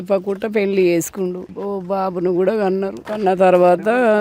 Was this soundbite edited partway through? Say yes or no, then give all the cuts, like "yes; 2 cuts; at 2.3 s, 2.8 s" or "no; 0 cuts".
yes; 2 cuts; at 1.5 s, 3.0 s